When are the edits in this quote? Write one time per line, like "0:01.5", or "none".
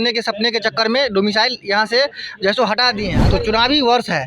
0:03.1